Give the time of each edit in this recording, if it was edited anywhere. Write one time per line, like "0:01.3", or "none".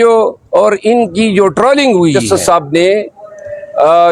0:02.2